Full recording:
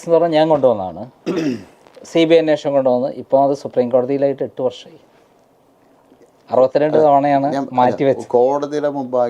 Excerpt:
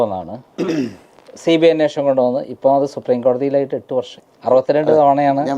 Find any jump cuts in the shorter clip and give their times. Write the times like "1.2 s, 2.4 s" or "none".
4.2 s